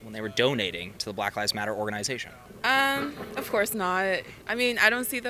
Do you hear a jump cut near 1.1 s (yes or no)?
no